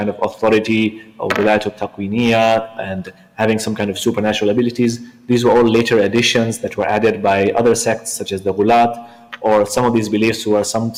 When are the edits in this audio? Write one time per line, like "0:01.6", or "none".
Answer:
none